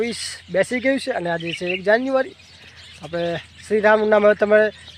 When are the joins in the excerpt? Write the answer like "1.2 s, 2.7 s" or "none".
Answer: none

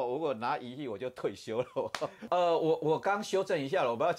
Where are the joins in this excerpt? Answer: 2.2 s

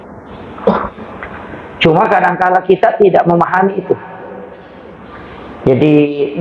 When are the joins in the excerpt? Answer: none

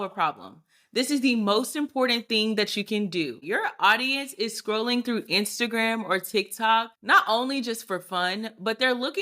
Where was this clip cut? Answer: 3.4 s, 7.0 s

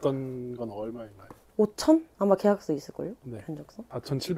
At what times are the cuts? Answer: none

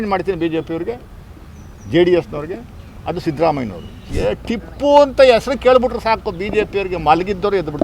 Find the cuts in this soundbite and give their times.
4.1 s

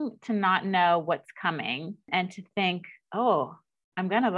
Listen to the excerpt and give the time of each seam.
2.0 s

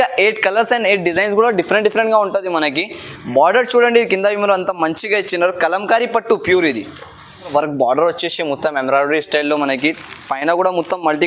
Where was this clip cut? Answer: 7.5 s

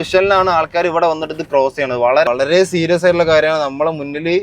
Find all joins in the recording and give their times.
2.3 s

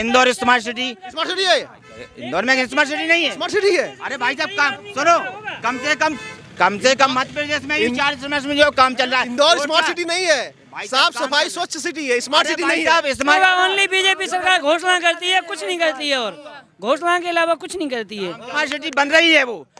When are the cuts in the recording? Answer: 13.4 s, 18.7 s

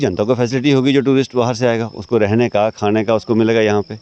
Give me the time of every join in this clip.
none

